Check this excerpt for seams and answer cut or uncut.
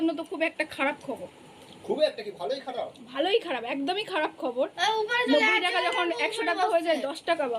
uncut